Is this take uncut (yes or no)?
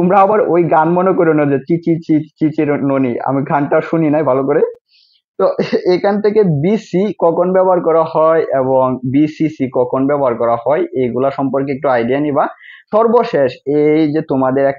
yes